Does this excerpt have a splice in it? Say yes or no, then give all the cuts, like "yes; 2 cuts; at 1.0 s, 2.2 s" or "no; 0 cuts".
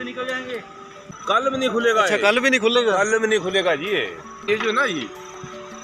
yes; 2 cuts; at 1.0 s, 4.4 s